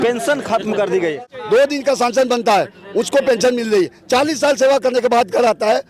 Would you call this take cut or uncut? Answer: cut